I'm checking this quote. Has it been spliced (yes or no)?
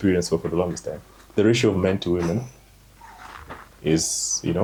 no